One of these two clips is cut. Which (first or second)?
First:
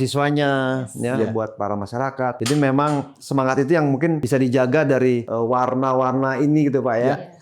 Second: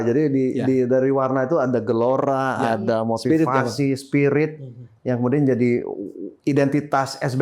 first